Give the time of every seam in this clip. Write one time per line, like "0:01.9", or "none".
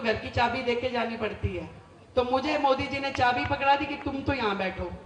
none